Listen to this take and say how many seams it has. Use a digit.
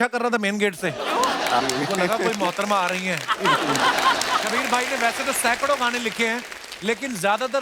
1